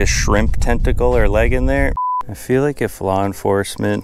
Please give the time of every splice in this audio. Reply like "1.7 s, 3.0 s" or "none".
2.1 s

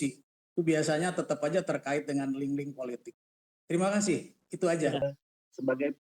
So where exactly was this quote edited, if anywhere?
5.0 s

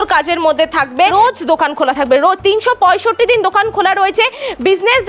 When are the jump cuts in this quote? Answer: 1.1 s

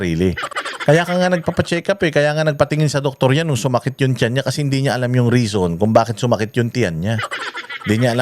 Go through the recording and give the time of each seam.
none

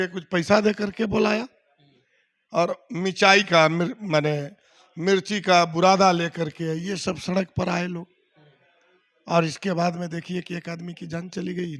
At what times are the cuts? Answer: none

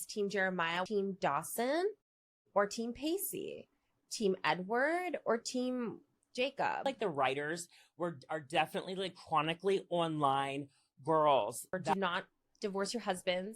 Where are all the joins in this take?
0.8 s, 6.8 s, 11.9 s

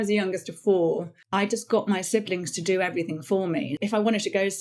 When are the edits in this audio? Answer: 1.2 s, 3.8 s

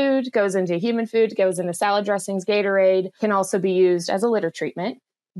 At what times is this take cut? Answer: 3.1 s

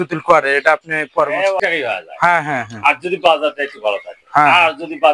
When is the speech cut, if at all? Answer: 1.6 s

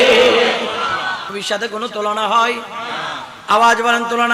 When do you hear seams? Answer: 1.3 s

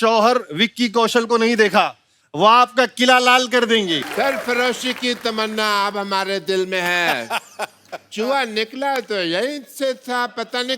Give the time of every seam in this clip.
4.0 s

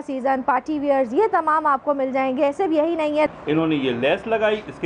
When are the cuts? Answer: 3.3 s

